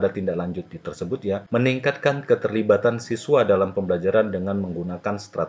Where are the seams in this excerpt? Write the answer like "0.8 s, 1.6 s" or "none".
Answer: 1.4 s